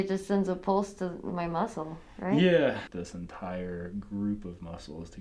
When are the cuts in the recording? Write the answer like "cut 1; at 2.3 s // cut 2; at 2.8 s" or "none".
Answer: cut 1; at 2.8 s